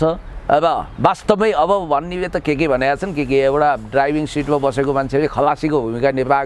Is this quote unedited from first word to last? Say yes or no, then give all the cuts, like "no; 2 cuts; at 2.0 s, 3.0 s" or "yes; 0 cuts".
yes; 0 cuts